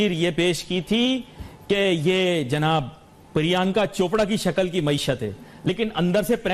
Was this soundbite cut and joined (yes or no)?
no